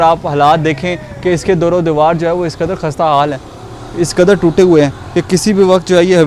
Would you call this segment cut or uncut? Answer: uncut